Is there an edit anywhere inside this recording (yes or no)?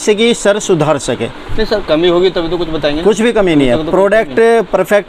no